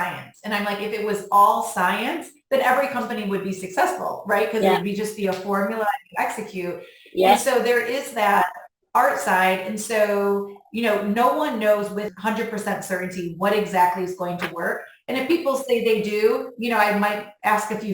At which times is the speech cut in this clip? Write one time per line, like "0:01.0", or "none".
0:12.1